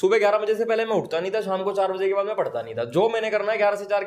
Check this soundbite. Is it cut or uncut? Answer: uncut